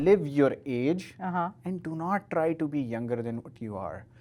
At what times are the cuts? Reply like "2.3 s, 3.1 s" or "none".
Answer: none